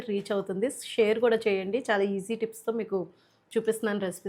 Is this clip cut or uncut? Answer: uncut